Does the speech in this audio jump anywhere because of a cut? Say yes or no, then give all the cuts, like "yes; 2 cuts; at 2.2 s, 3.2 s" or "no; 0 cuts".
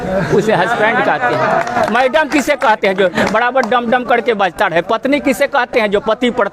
no; 0 cuts